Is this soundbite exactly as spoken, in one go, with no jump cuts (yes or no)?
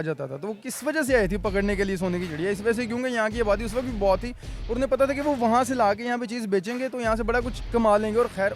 no